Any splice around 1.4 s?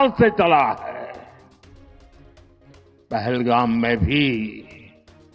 yes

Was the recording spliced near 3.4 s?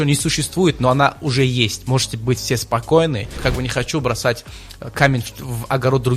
yes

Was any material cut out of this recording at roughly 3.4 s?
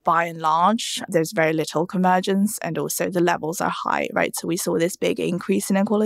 no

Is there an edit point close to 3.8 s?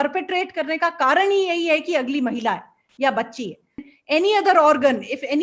yes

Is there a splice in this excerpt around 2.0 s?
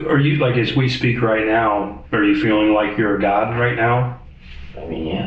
yes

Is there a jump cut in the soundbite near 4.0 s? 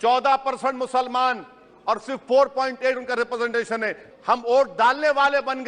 yes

